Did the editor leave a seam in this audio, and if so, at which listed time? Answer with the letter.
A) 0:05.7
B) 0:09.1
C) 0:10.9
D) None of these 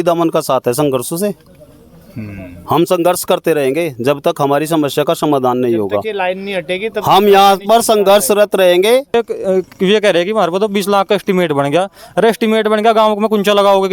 B